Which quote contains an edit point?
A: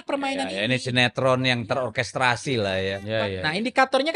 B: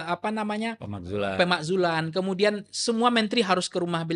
A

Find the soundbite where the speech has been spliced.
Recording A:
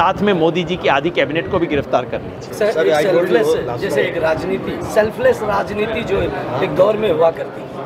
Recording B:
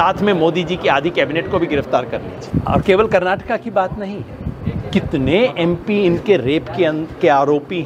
B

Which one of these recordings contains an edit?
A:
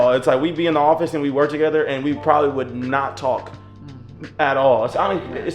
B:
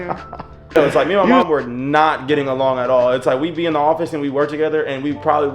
B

